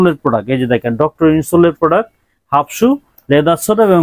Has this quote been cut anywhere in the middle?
no; 0 cuts

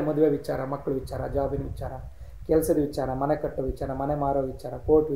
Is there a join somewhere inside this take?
no; 0 cuts

